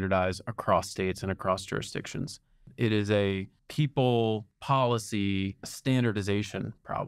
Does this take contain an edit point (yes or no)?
yes